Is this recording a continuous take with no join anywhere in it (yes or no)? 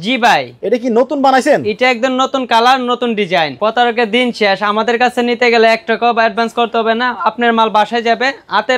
no